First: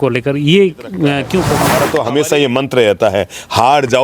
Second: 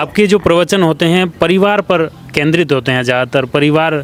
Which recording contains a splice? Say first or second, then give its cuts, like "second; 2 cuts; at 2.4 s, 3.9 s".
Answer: first; 1 cut; at 1.6 s